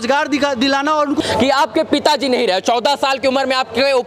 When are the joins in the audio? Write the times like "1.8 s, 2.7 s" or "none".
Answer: 1.2 s